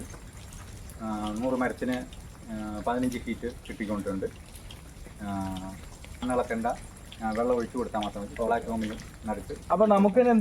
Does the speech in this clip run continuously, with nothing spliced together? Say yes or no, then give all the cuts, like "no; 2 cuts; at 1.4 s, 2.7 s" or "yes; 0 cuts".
no; 1 cut; at 6.2 s